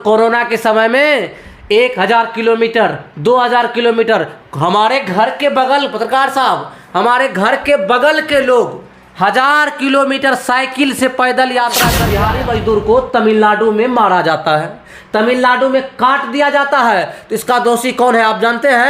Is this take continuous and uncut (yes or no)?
no